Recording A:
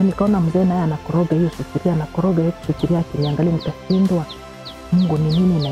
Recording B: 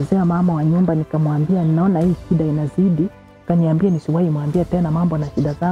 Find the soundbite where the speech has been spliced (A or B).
B